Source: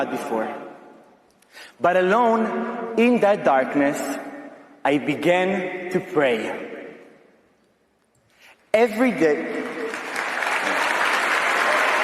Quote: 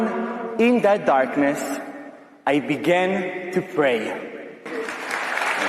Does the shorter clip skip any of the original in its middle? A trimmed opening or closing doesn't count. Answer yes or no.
yes